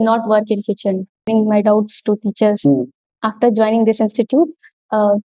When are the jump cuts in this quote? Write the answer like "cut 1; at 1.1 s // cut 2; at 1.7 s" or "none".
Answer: cut 1; at 1.3 s